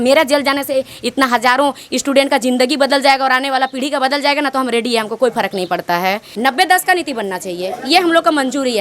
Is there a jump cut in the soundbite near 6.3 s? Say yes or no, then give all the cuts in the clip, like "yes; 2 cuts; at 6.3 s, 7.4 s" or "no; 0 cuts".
yes; 1 cut; at 6.3 s